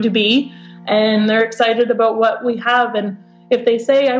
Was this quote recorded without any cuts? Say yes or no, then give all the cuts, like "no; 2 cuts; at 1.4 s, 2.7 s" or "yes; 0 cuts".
no; 1 cut; at 1.2 s